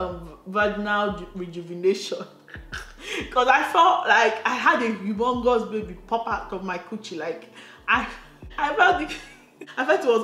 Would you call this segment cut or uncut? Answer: uncut